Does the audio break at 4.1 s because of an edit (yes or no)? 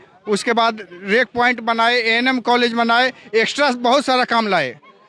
no